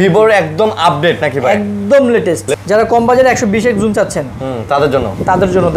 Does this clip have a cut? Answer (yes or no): yes